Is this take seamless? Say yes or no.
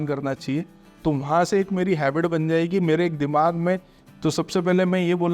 no